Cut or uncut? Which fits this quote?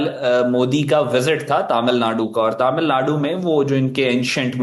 uncut